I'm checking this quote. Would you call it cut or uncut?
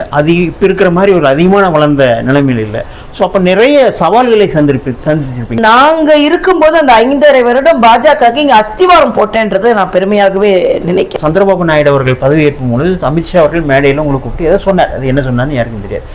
cut